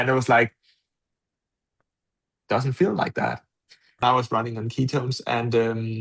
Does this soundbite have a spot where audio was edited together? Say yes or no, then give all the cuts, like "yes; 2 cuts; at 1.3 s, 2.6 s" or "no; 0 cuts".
yes; 1 cut; at 3.8 s